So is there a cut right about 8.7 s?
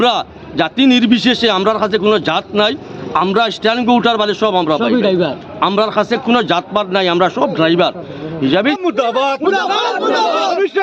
yes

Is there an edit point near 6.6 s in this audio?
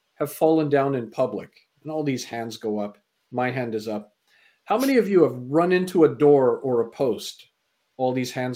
no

